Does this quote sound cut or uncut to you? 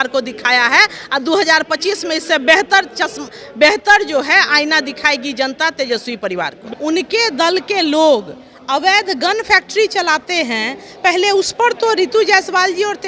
cut